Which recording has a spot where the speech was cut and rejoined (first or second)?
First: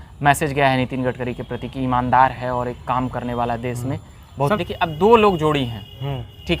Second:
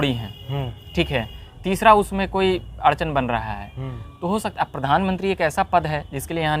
first